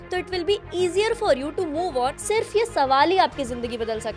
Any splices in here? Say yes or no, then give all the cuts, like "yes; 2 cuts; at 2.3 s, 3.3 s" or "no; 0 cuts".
yes; 1 cut; at 2.2 s